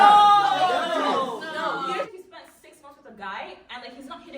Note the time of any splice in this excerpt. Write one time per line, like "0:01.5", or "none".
0:02.1